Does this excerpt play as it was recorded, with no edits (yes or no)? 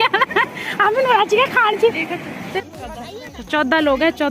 no